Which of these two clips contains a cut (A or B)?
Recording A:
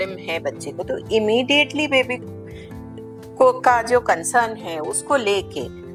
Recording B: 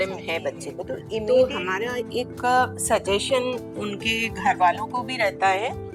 B